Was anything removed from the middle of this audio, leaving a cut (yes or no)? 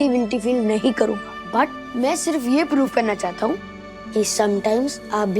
yes